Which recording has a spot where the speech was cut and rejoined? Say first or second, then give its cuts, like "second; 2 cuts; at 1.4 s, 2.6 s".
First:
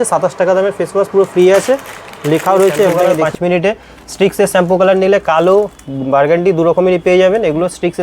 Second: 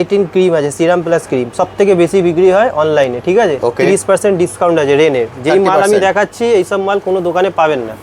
first; 1 cut; at 3.2 s